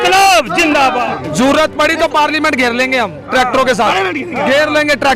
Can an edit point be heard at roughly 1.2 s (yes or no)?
yes